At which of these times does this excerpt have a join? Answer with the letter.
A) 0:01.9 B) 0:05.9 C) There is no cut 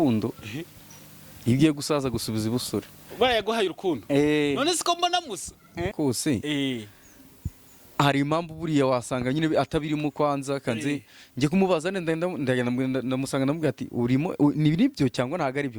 B